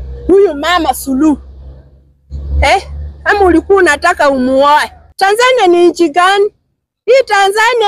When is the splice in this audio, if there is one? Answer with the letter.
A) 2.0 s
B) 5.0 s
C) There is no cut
B